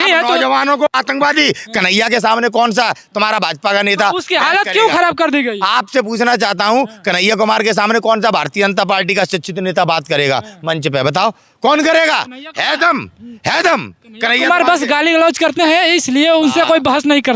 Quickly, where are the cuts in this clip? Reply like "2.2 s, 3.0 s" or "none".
none